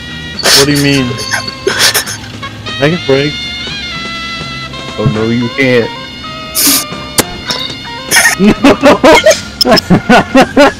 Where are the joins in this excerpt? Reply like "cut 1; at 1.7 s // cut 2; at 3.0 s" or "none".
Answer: cut 1; at 9.5 s